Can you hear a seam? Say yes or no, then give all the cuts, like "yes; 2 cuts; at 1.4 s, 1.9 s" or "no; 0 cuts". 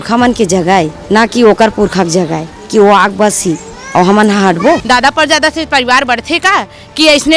yes; 2 cuts; at 1.0 s, 4.8 s